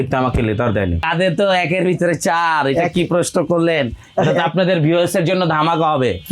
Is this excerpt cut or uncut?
cut